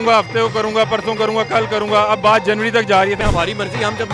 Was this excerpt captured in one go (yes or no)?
no